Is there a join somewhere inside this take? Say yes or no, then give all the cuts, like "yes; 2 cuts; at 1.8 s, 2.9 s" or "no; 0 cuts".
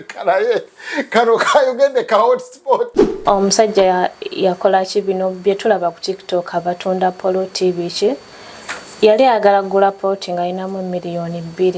yes; 1 cut; at 3.0 s